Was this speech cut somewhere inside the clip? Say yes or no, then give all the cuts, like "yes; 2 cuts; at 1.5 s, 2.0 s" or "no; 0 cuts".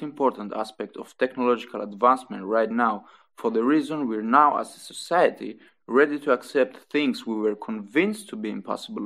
no; 0 cuts